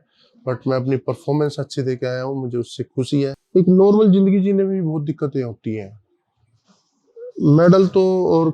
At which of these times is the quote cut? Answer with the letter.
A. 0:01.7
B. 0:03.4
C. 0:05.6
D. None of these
B